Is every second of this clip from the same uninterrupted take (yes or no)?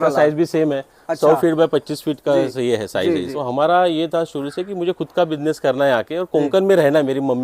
no